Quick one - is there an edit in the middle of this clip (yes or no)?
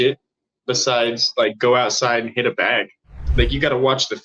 yes